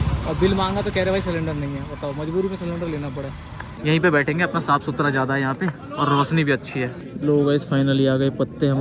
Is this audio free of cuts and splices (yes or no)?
no